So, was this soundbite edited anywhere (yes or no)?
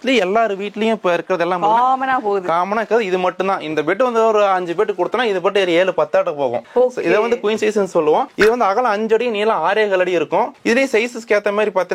no